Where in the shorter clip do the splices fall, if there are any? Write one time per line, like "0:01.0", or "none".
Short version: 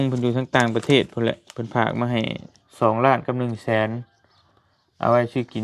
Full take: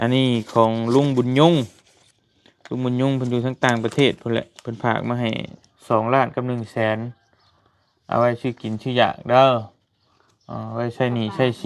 none